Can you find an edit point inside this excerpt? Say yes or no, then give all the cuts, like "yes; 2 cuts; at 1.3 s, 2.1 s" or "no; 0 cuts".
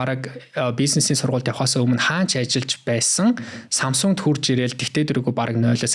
no; 0 cuts